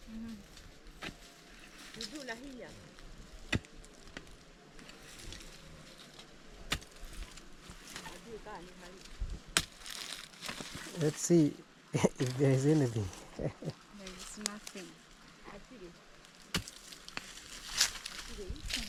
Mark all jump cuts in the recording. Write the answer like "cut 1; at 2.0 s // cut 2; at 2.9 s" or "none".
none